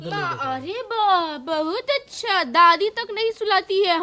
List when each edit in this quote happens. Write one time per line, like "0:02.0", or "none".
none